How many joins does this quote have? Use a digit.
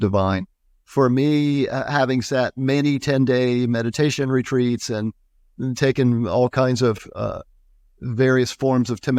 0